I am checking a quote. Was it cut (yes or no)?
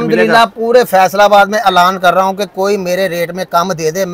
no